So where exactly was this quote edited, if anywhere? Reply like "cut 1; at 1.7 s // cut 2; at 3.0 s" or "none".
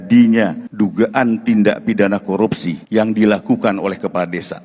none